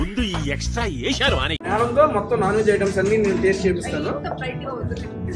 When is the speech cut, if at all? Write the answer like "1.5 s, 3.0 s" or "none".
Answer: none